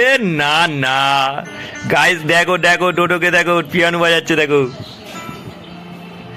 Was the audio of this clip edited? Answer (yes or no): no